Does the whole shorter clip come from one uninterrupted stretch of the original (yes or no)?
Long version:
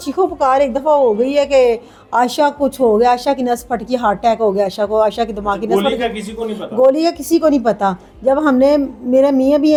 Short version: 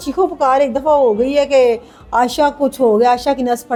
yes